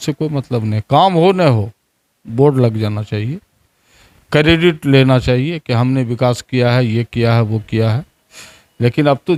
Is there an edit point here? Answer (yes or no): no